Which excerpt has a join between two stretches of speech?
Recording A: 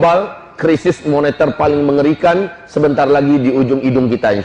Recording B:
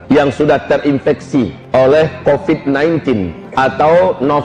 B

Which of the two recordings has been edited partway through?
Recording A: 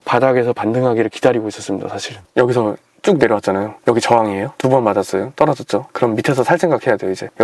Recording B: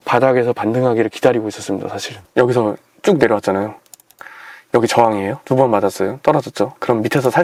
A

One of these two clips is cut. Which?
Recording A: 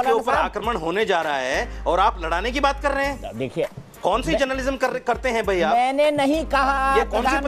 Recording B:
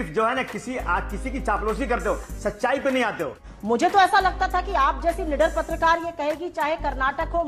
B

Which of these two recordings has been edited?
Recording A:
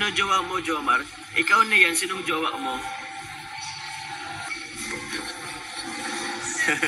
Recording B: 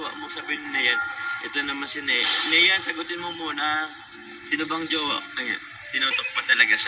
A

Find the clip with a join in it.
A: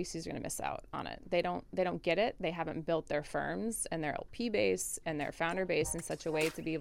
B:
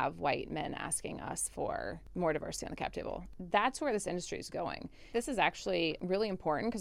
B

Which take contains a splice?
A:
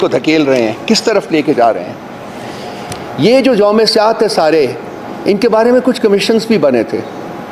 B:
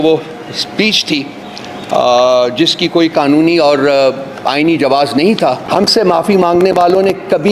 B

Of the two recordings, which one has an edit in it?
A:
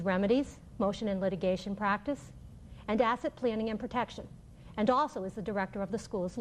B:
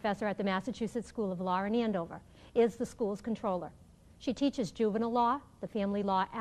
A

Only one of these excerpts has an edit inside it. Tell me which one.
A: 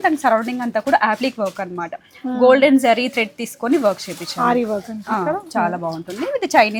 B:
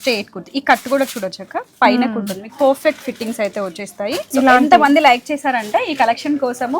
B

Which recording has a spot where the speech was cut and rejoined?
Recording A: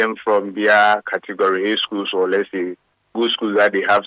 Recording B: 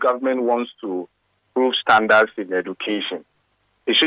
B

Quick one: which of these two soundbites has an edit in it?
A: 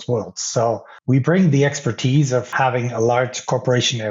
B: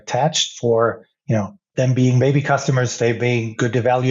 A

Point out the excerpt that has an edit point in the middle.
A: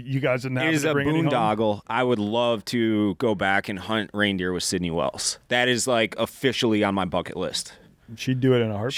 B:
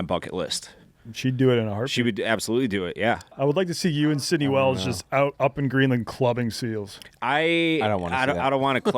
B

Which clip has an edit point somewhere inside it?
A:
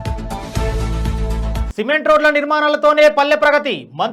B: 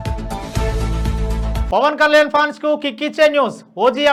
A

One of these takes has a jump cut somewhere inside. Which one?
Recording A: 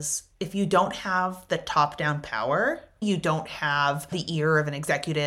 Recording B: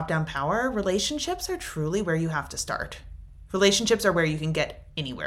A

